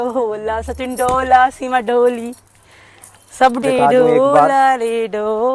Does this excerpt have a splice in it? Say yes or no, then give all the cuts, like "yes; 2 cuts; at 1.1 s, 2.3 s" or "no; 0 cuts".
yes; 1 cut; at 3.6 s